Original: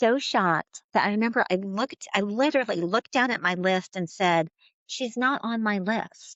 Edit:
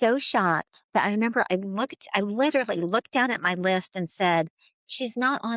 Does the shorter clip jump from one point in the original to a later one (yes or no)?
no